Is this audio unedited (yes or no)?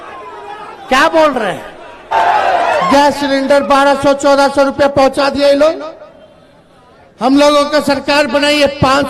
no